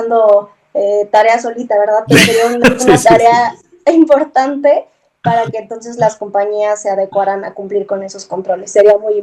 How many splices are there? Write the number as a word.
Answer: zero